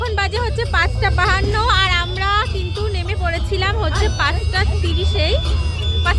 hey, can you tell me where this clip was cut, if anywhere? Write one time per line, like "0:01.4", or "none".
none